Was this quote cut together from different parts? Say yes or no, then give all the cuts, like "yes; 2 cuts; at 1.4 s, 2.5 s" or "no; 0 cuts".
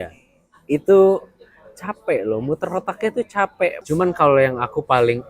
yes; 1 cut; at 3.8 s